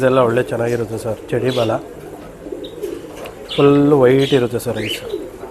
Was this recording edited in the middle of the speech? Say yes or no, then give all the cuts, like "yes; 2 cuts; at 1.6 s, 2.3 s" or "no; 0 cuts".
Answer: no; 0 cuts